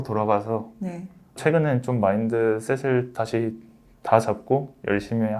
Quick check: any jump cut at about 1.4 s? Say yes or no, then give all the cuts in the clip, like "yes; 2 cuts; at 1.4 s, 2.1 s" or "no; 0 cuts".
yes; 1 cut; at 1.4 s